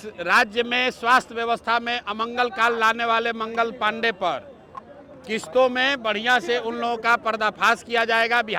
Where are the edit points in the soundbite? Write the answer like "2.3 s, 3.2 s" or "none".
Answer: none